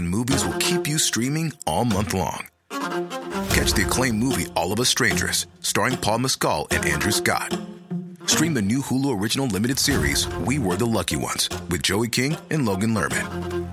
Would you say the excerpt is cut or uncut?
uncut